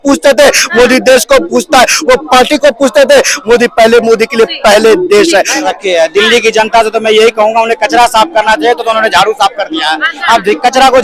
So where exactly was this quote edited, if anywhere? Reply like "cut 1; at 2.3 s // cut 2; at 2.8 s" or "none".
cut 1; at 5.6 s